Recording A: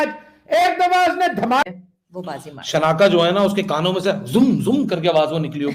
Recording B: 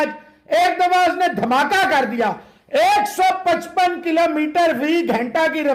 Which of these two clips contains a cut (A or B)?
A